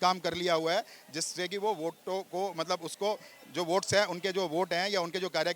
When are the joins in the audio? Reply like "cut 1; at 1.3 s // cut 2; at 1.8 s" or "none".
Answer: none